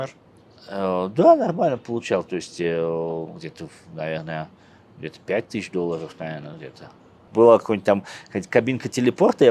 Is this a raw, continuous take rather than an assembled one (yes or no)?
no